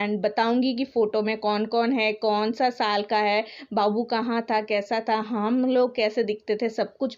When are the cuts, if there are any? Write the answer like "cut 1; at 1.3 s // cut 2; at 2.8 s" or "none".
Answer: none

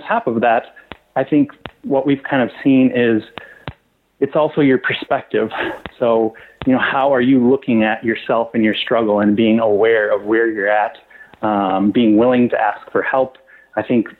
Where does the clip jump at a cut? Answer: none

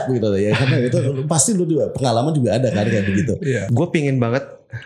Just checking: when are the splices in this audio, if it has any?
cut 1; at 3.7 s

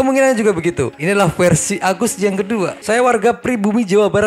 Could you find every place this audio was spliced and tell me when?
cut 1; at 2.8 s

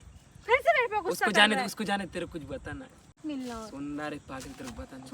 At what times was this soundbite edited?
cut 1; at 3.2 s

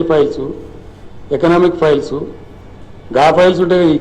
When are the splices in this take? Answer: none

